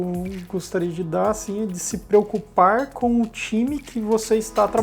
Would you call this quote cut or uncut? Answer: cut